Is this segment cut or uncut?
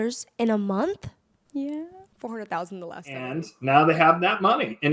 cut